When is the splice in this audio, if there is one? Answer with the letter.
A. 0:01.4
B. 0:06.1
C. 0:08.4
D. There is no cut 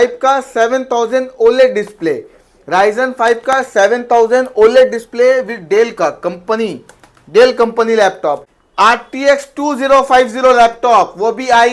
C